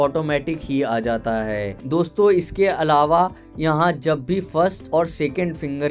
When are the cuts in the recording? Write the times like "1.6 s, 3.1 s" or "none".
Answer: 1.8 s